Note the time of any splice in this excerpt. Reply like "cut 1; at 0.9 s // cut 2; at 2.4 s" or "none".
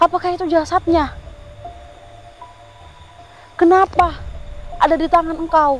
cut 1; at 1.2 s // cut 2; at 3.4 s